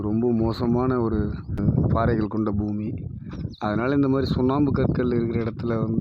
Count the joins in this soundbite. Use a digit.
1